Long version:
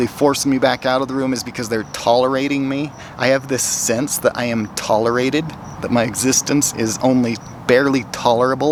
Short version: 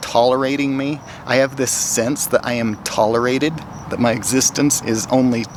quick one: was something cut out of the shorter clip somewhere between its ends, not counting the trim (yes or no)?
no